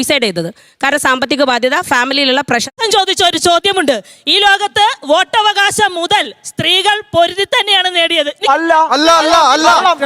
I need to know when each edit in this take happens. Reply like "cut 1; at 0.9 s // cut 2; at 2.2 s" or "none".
cut 1; at 2.7 s